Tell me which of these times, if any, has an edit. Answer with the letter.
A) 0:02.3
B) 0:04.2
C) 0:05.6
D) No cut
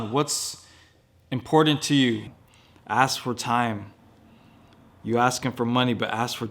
A